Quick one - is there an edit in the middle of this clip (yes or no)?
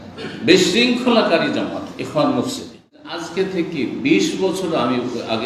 yes